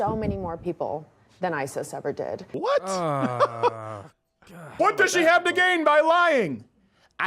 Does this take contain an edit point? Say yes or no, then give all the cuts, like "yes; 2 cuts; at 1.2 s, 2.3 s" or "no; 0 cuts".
yes; 2 cuts; at 2.5 s, 4.7 s